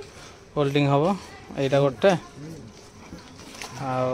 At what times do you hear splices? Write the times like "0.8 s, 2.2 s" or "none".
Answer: none